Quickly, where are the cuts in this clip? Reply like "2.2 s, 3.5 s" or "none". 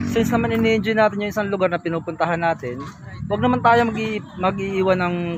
2.9 s